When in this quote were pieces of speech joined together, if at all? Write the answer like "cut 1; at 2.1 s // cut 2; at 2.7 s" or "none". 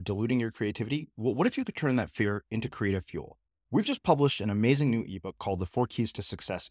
none